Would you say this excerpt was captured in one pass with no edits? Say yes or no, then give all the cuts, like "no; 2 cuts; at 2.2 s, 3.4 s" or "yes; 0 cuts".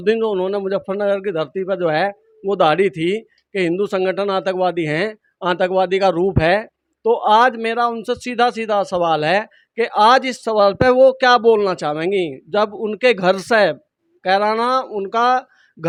yes; 0 cuts